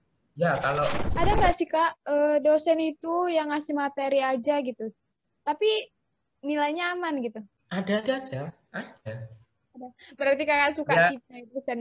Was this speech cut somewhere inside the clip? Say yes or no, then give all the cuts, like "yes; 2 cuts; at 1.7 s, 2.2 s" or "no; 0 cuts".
yes; 1 cut; at 1.0 s